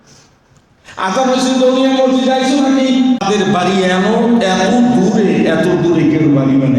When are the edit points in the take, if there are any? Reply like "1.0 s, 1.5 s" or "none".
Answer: 3.2 s